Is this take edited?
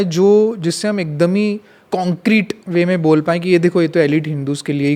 no; 0 cuts

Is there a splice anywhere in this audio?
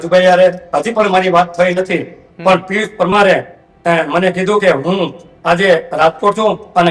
no; 0 cuts

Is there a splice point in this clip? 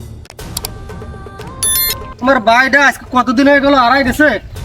yes; 1 cut; at 2.1 s

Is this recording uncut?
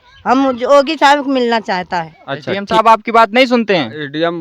no; 1 cut; at 2.5 s

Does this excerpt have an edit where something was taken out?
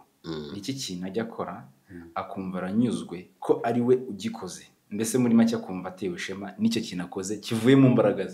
no; 0 cuts

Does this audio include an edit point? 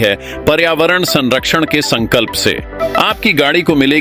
yes; 1 cut; at 2.8 s

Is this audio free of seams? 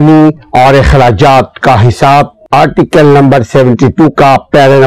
no; 1 cut; at 2.4 s

